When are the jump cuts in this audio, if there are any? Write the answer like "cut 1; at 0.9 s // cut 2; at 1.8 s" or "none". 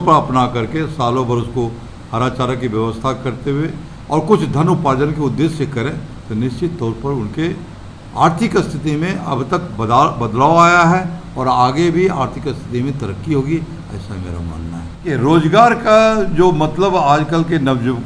cut 1; at 15.0 s